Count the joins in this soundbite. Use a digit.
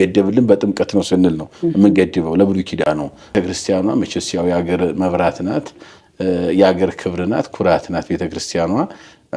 1